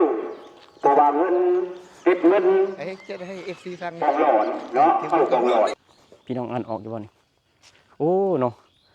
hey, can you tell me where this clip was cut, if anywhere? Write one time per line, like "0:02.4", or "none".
0:05.9